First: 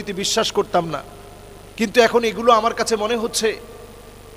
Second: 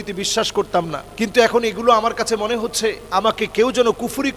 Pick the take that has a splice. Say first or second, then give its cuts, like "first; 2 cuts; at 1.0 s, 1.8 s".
second; 2 cuts; at 1.0 s, 3.0 s